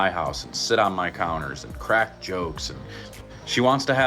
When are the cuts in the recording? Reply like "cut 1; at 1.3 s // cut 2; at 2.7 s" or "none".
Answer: cut 1; at 3.1 s

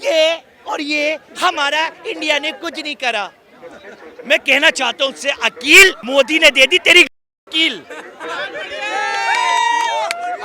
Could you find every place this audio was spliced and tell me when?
none

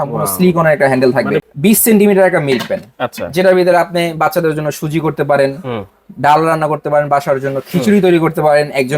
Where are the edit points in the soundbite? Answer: cut 1; at 1.4 s

